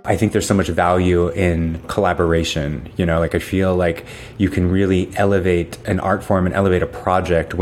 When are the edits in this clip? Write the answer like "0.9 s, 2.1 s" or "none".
1.8 s